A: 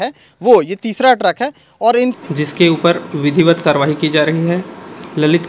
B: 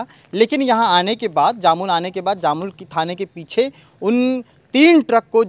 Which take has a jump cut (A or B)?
A